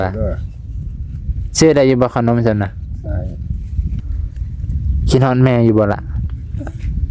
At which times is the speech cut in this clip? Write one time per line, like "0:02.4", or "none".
0:03.9